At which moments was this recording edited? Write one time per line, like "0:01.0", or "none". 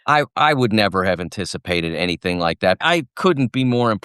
0:02.8